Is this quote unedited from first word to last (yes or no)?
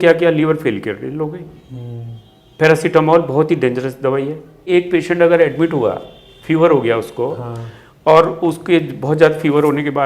no